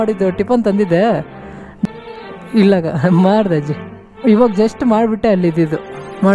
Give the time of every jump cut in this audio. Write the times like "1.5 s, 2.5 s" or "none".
1.9 s

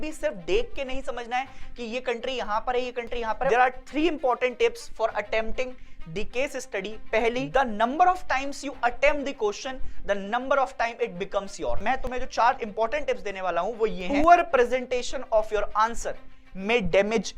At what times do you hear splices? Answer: 3.5 s, 7.4 s, 11.8 s, 14.0 s

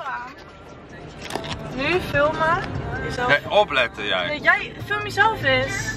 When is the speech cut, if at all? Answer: none

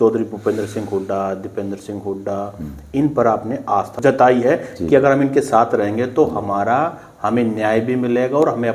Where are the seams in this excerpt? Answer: 4.0 s

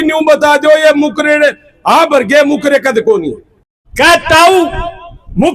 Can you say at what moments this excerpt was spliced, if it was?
3.8 s

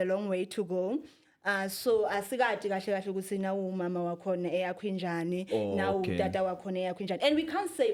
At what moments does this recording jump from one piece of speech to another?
none

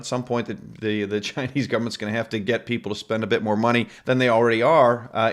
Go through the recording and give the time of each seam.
3.9 s

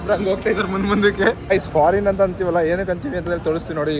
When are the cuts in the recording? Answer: 1.5 s

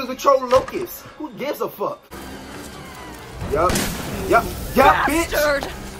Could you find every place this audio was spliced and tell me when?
2.1 s

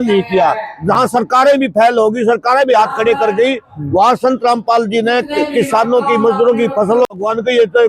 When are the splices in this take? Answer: none

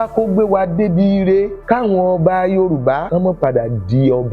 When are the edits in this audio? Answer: 1.6 s, 3.0 s

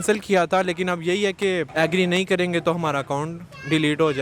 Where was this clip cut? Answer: 1.7 s

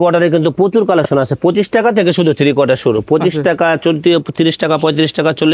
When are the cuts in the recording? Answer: none

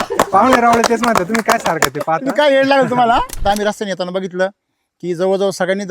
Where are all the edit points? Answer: 3.3 s

